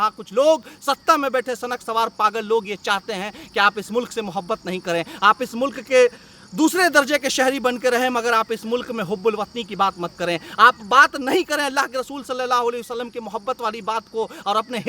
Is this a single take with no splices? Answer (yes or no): yes